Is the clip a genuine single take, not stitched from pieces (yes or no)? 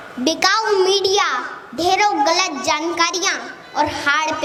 yes